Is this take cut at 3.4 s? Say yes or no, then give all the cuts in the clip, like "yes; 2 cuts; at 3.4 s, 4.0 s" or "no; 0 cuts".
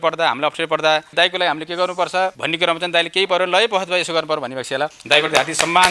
no; 2 cuts; at 1.1 s, 5.0 s